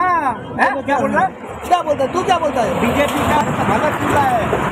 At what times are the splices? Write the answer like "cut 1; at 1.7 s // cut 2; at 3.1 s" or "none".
cut 1; at 1.4 s